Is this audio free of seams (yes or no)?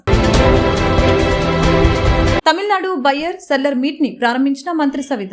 yes